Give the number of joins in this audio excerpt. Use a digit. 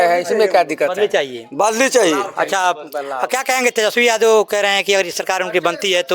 0